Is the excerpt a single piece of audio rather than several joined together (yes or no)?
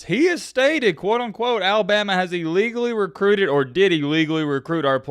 yes